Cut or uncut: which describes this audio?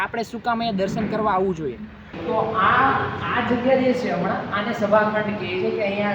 cut